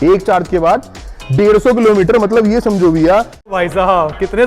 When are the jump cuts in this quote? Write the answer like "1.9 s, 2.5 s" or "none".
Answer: 3.5 s